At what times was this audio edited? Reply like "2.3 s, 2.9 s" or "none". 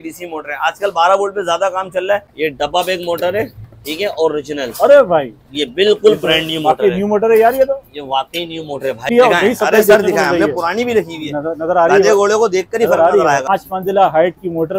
2.3 s, 9.1 s, 13.5 s